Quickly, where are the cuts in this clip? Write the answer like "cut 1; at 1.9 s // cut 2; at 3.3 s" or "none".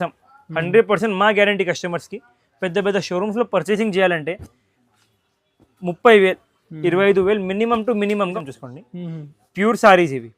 cut 1; at 8.3 s